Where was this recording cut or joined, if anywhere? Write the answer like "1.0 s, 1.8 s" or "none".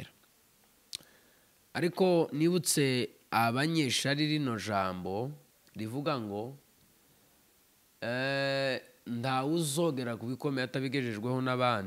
none